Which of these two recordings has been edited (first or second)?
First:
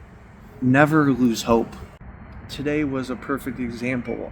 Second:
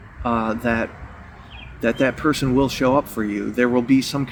first